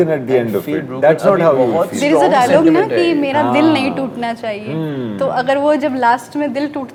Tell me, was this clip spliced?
no; 0 cuts

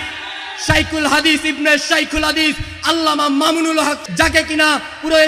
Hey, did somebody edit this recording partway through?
yes; 1 cut; at 4.0 s

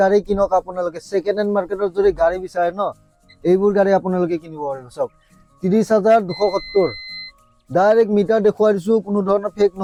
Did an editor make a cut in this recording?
no; 0 cuts

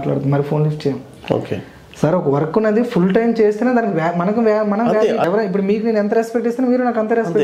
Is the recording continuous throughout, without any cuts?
no; 1 cut; at 5.2 s

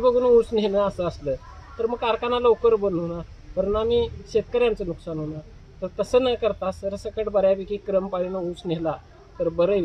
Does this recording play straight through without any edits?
yes; 0 cuts

